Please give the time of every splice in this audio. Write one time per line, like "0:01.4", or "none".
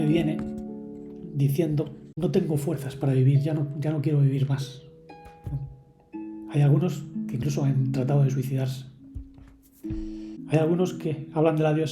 0:02.1
0:10.4